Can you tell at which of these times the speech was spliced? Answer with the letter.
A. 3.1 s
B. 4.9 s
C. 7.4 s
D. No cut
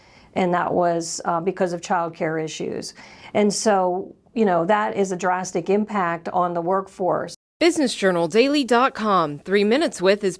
C